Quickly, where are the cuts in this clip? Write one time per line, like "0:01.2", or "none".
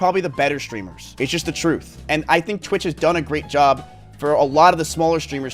0:02.0